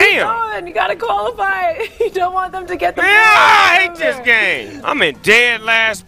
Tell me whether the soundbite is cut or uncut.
cut